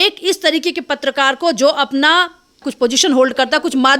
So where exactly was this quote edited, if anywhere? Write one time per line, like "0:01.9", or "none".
0:02.7